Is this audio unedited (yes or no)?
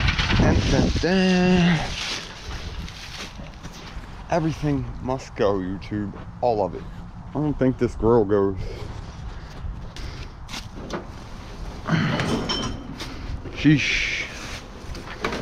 yes